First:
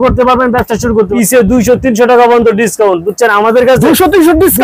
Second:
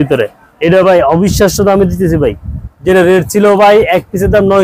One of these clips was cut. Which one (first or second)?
first